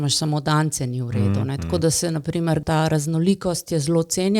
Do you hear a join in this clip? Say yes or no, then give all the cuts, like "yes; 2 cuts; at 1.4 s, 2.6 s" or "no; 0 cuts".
yes; 1 cut; at 2.6 s